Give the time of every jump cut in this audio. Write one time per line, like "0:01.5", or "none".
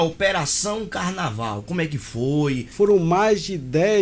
0:02.7